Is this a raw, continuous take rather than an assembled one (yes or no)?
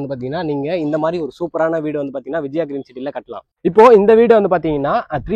yes